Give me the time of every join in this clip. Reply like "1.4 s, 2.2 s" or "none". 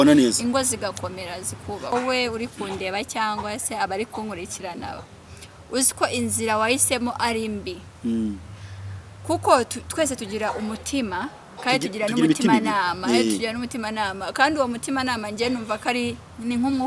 1.9 s